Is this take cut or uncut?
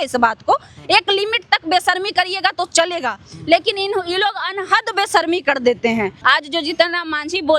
cut